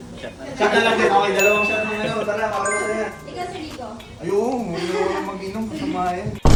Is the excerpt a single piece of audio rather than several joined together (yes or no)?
yes